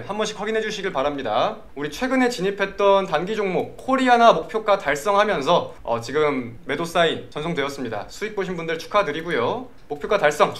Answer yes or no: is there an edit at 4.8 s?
no